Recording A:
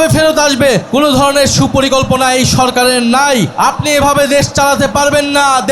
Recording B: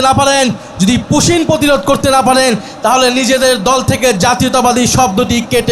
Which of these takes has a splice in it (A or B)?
A